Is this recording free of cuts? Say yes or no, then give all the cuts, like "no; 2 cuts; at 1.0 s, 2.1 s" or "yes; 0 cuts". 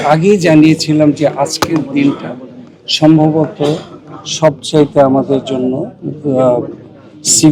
yes; 0 cuts